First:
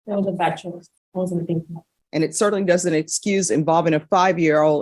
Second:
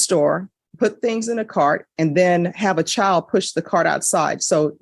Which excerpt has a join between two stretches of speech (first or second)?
first